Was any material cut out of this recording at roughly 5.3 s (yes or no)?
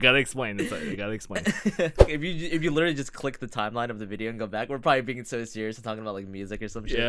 no